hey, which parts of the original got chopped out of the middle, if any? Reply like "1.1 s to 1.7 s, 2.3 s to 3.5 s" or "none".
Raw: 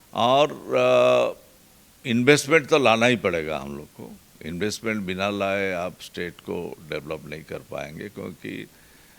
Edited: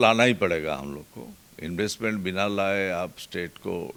none